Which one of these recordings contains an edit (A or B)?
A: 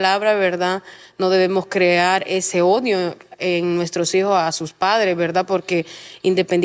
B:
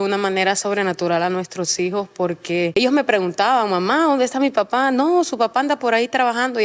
B